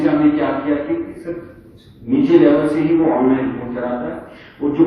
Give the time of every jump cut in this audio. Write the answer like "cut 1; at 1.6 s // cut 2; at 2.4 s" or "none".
none